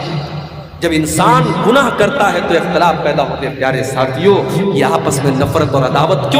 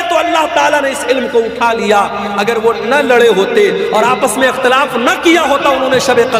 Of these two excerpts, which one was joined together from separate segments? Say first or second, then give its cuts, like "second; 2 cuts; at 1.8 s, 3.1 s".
first; 1 cut; at 3.5 s